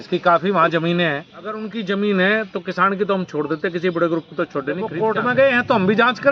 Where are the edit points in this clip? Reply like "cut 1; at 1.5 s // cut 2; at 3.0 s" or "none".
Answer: cut 1; at 1.7 s // cut 2; at 4.9 s

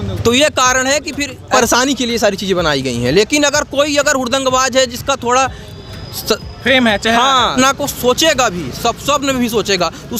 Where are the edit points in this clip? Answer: cut 1; at 1.4 s // cut 2; at 7.5 s

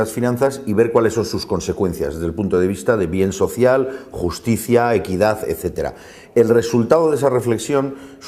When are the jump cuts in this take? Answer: cut 1; at 4.0 s

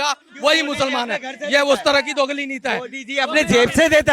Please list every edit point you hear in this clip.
none

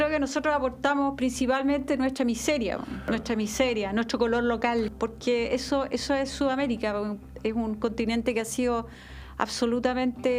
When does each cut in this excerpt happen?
cut 1; at 3.0 s // cut 2; at 4.9 s

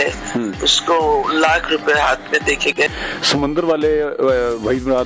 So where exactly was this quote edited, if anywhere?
cut 1; at 2.9 s

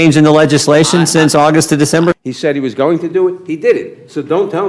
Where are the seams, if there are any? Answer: cut 1; at 2.2 s

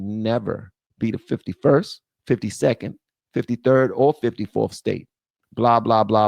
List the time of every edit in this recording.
cut 1; at 5.3 s

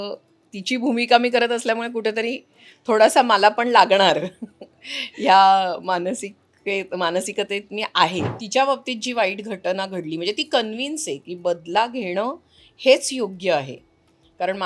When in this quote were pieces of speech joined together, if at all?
cut 1; at 8.4 s

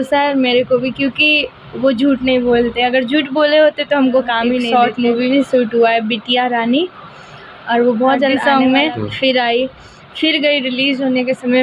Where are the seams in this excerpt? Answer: cut 1; at 4.7 s // cut 2; at 8.4 s

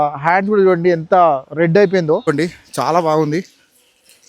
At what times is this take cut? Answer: cut 1; at 2.3 s

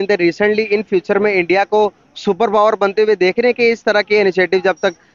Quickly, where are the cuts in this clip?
none

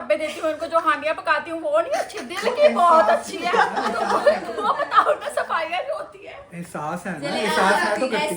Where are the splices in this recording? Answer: none

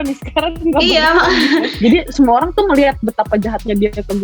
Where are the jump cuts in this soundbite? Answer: cut 1; at 1.7 s

